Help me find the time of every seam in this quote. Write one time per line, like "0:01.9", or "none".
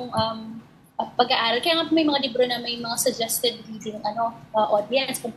none